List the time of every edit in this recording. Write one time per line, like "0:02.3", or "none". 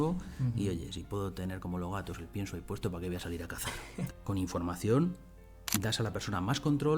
0:04.0